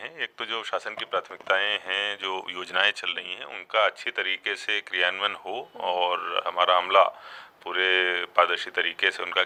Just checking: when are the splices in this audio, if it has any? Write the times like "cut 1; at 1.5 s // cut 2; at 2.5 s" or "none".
none